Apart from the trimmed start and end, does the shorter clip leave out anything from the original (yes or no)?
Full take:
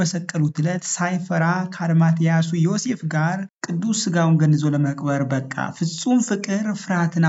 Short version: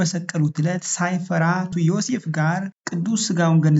yes